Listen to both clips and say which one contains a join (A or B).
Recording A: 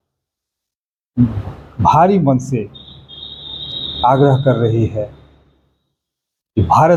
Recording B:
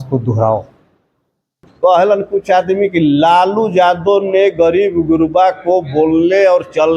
B